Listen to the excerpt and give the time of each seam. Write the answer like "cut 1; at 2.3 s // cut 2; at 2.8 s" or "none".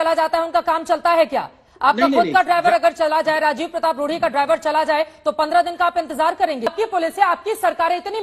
cut 1; at 6.7 s

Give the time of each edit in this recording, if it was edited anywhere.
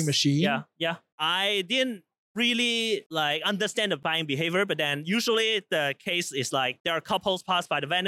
cut 1; at 1.0 s

